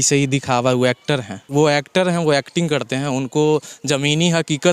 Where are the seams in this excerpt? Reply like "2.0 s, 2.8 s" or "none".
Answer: 1.4 s